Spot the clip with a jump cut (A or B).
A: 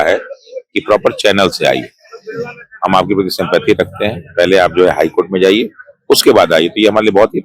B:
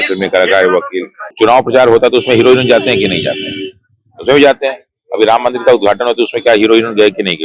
B